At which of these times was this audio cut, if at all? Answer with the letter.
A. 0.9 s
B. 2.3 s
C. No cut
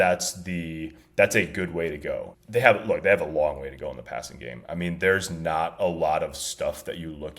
B